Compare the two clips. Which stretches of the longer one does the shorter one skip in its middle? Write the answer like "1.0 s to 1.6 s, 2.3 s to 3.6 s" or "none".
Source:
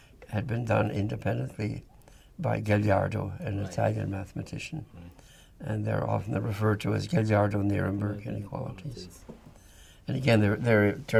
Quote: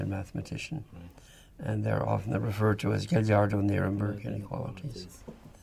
none